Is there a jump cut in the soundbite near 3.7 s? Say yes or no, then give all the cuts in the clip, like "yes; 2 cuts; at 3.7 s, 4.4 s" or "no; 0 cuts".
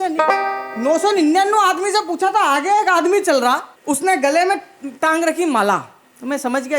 yes; 1 cut; at 3.7 s